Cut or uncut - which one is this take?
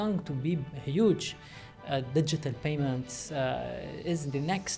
uncut